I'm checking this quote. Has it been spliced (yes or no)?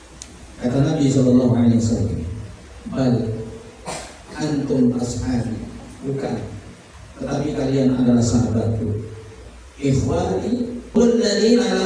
yes